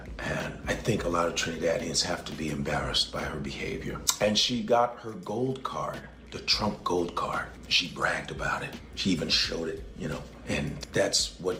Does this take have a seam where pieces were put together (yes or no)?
no